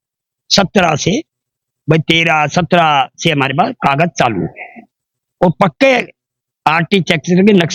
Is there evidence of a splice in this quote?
no; 0 cuts

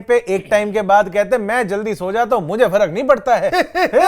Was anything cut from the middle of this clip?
no; 0 cuts

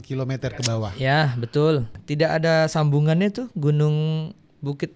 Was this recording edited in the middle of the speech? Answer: yes; 1 cut; at 2.0 s

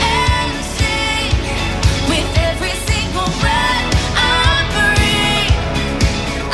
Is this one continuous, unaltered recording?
yes; 0 cuts

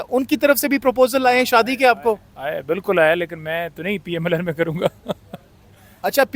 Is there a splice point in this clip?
no; 0 cuts

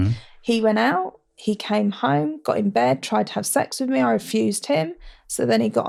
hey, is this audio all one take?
yes; 0 cuts

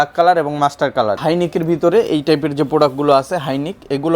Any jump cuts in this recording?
yes; 1 cut; at 1.2 s

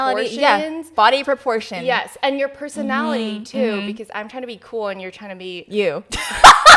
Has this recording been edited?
no; 0 cuts

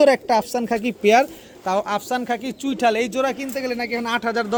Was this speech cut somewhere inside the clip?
no; 0 cuts

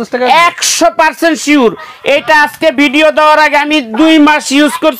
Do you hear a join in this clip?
no; 0 cuts

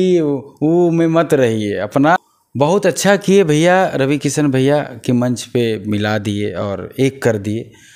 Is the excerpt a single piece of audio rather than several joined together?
no; 1 cut; at 2.4 s

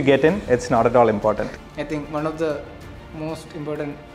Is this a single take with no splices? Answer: no; 1 cut; at 1.6 s

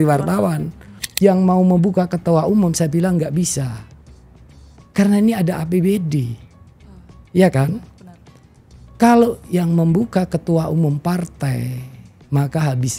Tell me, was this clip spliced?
yes; 1 cut; at 1.0 s

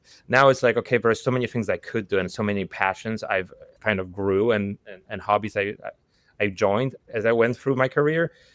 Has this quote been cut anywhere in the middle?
yes; 1 cut; at 7.0 s

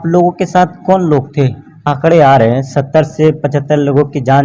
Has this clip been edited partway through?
yes; 1 cut; at 1.9 s

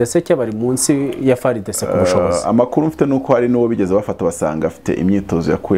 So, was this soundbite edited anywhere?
no; 0 cuts

